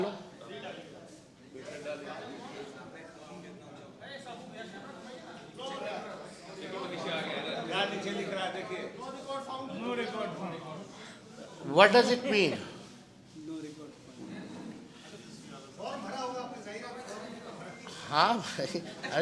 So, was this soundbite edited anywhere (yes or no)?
no